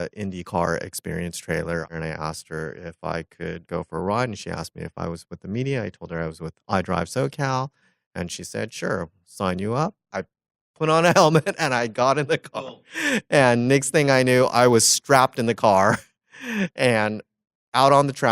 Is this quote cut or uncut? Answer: cut